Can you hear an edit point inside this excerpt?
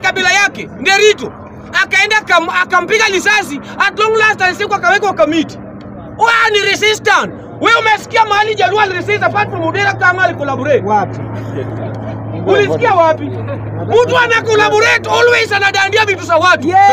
no; 0 cuts

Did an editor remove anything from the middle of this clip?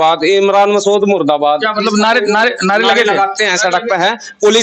no; 0 cuts

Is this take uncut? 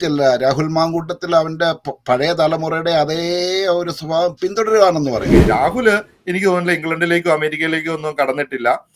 no; 1 cut; at 5.3 s

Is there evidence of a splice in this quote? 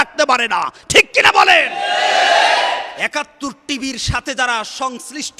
yes; 1 cut; at 2.9 s

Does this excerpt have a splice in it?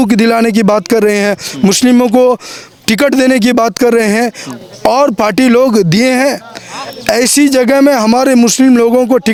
no; 0 cuts

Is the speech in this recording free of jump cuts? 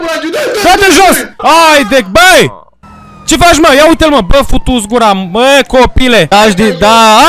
no; 2 cuts; at 1.3 s, 6.3 s

